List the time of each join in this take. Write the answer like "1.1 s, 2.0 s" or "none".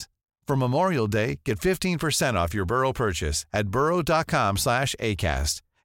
none